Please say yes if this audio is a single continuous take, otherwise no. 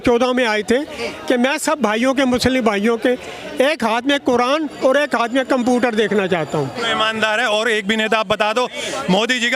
no